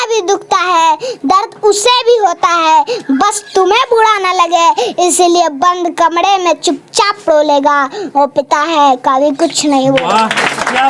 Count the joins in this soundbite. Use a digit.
0